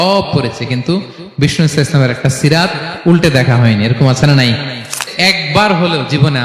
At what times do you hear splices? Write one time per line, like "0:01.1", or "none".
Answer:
0:05.1